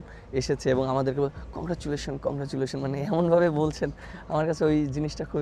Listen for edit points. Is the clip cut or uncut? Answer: uncut